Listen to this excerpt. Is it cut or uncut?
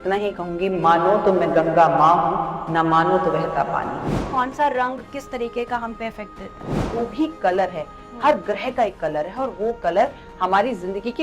cut